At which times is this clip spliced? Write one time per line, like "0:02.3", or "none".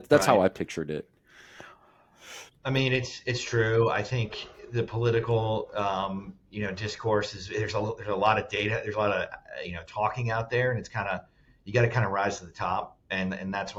none